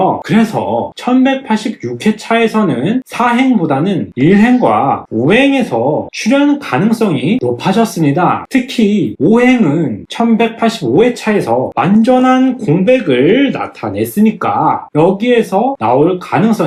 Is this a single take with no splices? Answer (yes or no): yes